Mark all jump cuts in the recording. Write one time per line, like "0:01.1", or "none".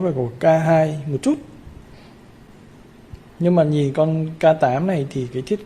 0:02.5